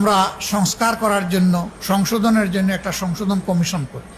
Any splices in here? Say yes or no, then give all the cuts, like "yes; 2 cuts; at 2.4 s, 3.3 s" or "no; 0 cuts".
no; 0 cuts